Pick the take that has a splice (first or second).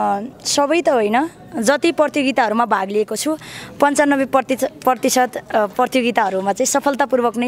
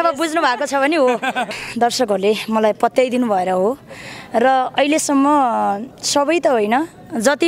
second